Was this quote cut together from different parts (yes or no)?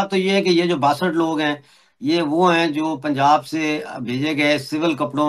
no